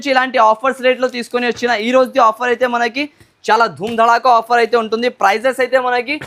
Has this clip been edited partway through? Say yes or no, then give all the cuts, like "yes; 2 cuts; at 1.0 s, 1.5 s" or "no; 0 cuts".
no; 0 cuts